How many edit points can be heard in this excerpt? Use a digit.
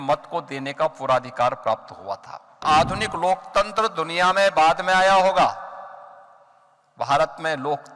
1